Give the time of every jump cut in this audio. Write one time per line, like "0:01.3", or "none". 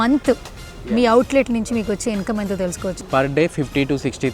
0:03.0